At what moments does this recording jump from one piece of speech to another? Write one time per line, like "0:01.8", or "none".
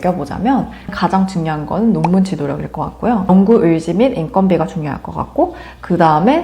0:00.9
0:03.3